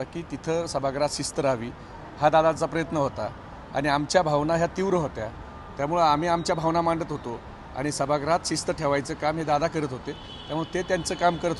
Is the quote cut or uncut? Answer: uncut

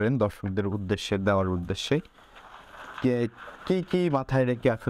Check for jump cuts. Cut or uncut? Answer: uncut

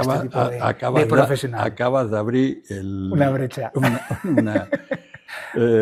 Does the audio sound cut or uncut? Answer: uncut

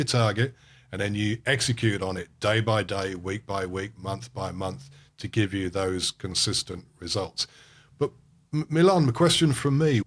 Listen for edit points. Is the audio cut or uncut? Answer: uncut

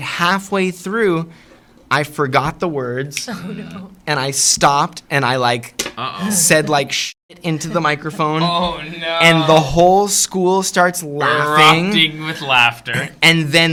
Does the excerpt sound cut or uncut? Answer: uncut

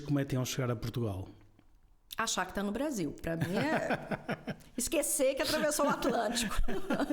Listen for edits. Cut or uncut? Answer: uncut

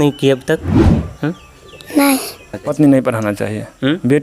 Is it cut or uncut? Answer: cut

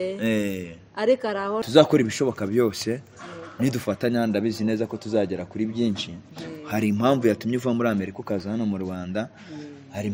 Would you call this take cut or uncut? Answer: cut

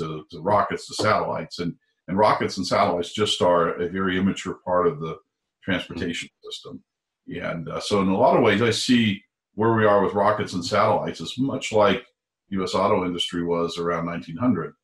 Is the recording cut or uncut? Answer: uncut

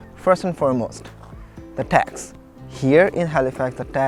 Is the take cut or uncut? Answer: uncut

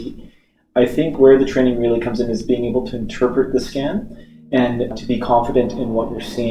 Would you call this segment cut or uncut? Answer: cut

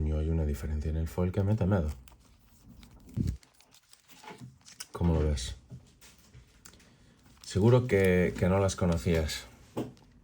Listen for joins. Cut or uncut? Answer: cut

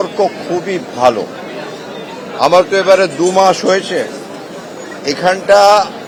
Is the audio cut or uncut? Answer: uncut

